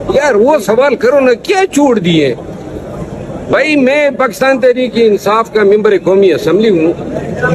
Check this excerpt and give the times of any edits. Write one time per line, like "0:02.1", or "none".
none